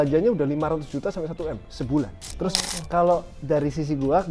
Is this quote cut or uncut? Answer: cut